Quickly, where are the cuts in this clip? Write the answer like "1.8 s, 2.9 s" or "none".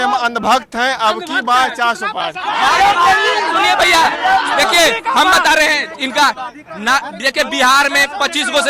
none